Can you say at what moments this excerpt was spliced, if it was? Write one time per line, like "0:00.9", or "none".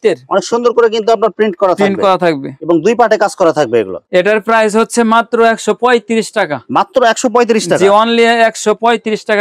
none